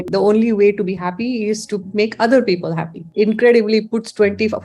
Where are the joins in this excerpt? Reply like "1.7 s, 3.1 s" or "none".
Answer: 3.1 s